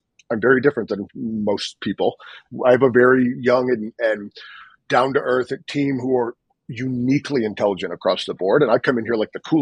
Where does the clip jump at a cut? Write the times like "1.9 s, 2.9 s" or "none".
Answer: 2.4 s